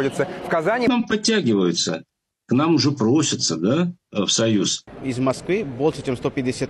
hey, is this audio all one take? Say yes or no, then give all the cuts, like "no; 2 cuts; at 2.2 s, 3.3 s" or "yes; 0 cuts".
no; 2 cuts; at 0.9 s, 5.0 s